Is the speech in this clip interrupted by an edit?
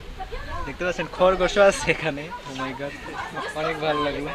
no; 0 cuts

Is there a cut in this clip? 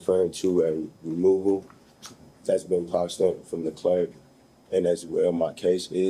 no; 0 cuts

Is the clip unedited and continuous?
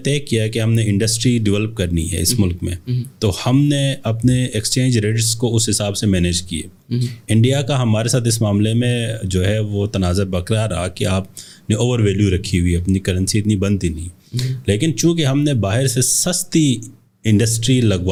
yes; 0 cuts

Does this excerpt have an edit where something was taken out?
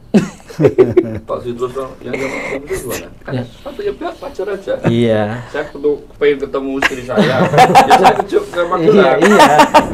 no; 0 cuts

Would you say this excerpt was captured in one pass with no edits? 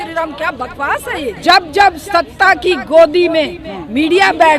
no; 1 cut; at 1.3 s

